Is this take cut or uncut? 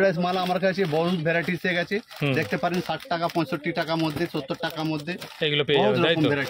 uncut